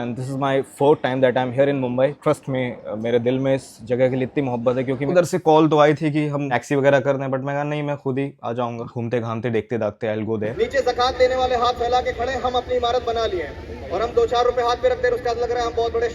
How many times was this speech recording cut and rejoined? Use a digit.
3